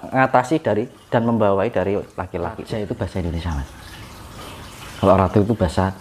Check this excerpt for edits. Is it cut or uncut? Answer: cut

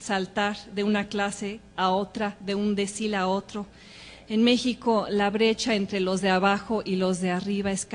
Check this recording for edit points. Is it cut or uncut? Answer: cut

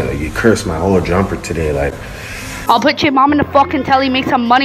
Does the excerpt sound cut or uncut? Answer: cut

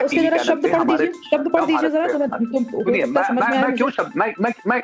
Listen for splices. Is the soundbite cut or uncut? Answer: uncut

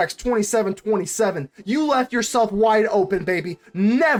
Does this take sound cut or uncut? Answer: uncut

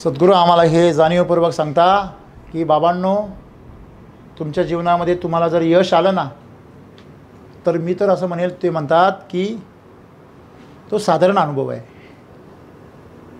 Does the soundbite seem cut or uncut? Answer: uncut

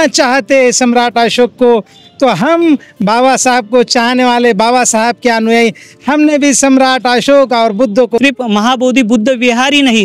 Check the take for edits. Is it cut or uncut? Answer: cut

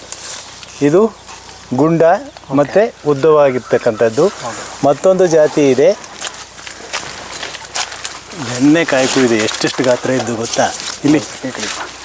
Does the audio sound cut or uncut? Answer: uncut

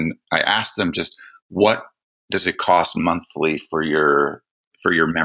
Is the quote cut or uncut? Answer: uncut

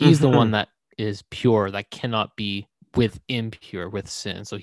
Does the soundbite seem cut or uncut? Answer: cut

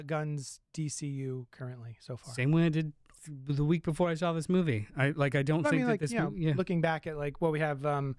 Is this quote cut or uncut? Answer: uncut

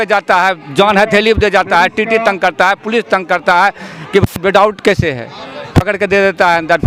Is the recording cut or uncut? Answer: uncut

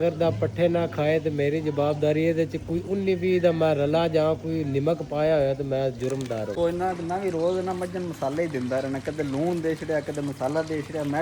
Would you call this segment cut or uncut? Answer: cut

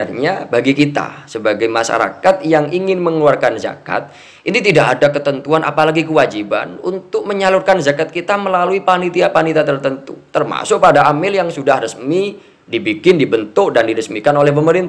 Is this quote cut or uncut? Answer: uncut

